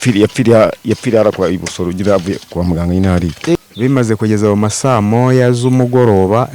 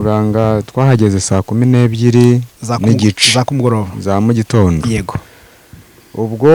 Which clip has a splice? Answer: first; 1 cut; at 3.6 s

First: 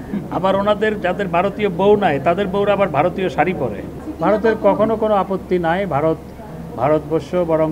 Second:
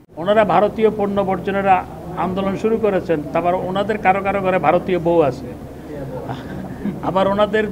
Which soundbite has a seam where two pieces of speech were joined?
first; 1 cut; at 4.0 s

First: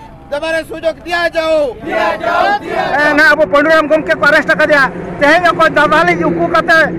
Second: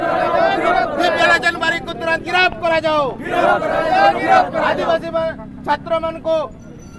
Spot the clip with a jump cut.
first; 1 cut; at 2.9 s

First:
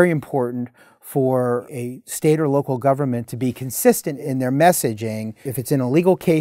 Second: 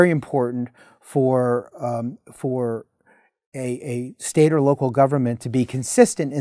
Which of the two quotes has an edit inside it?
first; 3 cuts; at 1.7 s, 4.1 s, 5.5 s

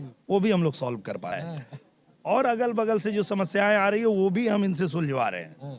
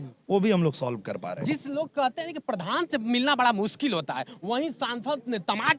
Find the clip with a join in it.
first; 1 cut; at 1.3 s

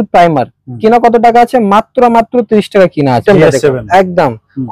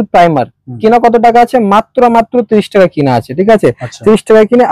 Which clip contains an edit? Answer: first; 1 cut; at 3.2 s

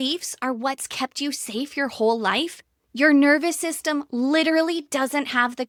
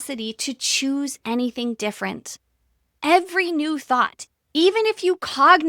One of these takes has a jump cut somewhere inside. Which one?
second; 2 cuts; at 3.0 s, 4.2 s

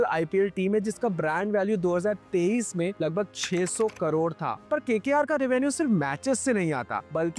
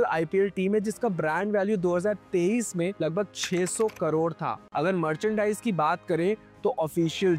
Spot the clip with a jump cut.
second; 1 cut; at 4.6 s

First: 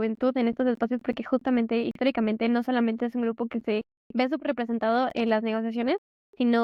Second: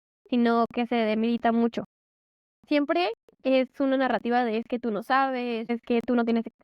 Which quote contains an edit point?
second; 1 cut; at 5.7 s

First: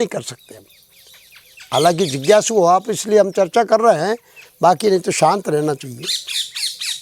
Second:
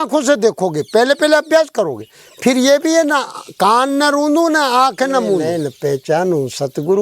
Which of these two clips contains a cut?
second; 1 cut; at 5.4 s

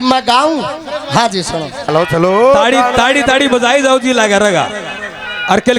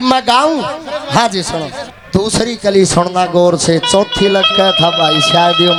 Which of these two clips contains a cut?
first; 1 cut; at 1.9 s

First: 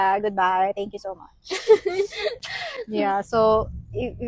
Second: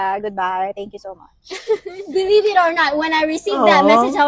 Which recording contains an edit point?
second; 1 cut; at 1.9 s

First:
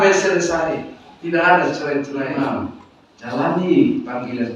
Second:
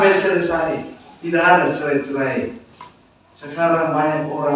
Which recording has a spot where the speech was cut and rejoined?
first; 1 cut; at 2.3 s

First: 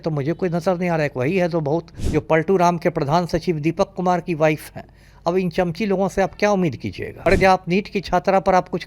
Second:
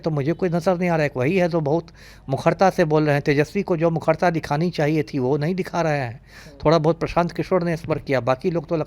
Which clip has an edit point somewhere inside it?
first; 2 cuts; at 2.0 s, 7.0 s

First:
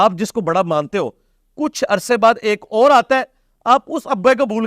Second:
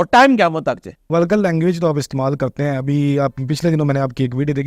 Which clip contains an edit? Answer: second; 1 cut; at 1.0 s

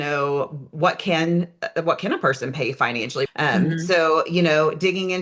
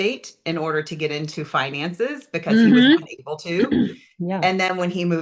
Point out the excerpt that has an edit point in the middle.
first; 1 cut; at 3.3 s

